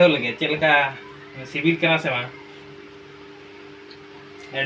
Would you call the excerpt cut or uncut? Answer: uncut